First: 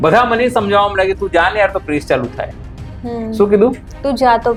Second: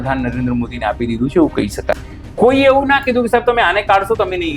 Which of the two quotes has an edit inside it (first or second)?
second